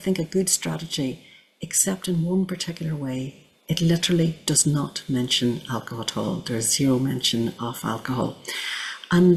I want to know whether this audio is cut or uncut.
uncut